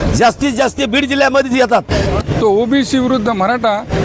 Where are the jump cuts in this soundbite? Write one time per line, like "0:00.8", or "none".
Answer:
0:02.2